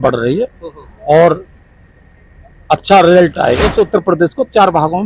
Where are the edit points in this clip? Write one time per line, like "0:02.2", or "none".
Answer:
0:03.7